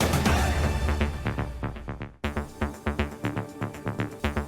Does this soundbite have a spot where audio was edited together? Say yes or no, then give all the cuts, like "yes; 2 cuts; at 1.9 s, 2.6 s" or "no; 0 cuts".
yes; 1 cut; at 2.1 s